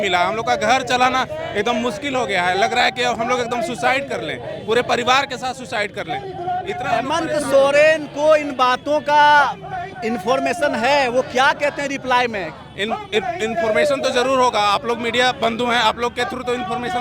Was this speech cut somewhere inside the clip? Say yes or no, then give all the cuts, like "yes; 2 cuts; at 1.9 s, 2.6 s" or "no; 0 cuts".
no; 0 cuts